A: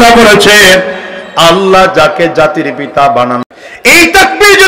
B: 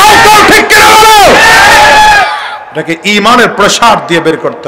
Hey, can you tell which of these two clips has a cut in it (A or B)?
A